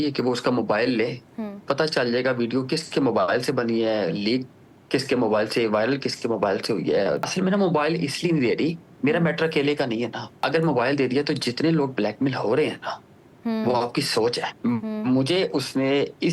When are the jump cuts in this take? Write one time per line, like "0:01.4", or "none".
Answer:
0:01.6
0:07.3
0:10.3
0:14.5

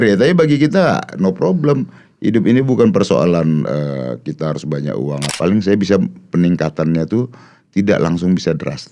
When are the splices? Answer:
0:05.3

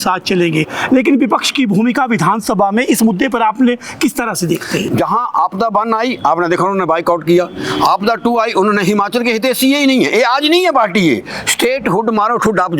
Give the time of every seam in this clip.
none

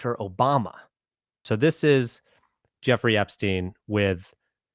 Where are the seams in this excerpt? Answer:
0:01.4

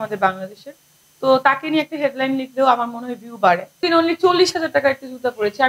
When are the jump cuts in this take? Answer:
0:03.8

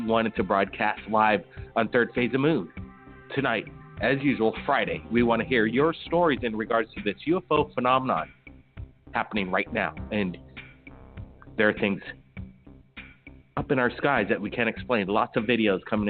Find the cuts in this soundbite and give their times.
0:06.8

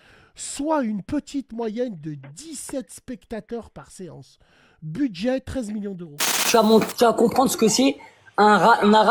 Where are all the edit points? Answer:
0:06.5

